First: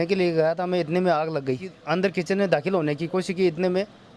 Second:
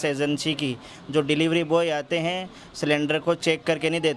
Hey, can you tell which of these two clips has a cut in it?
first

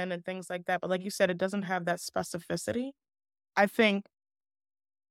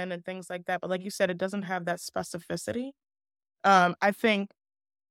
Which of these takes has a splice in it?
first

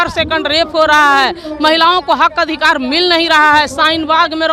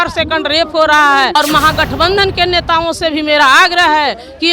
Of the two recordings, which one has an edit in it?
second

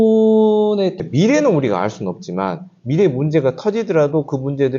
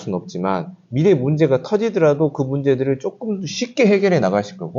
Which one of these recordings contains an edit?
first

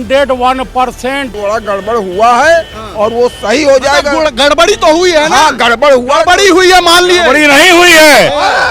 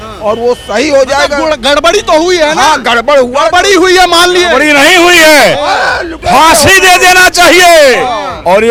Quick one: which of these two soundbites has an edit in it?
first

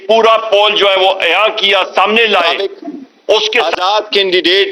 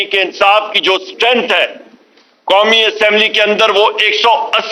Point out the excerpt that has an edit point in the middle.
first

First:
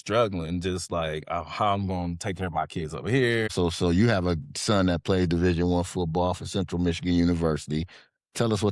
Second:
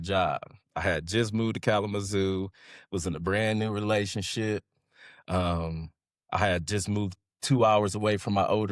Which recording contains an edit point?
first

